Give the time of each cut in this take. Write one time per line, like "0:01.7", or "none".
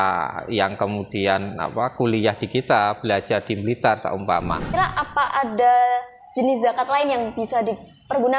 0:04.7